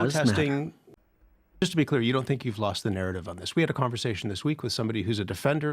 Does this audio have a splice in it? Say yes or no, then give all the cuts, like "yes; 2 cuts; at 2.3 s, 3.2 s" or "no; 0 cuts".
yes; 1 cut; at 1.3 s